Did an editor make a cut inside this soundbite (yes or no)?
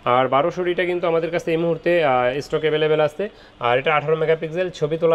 no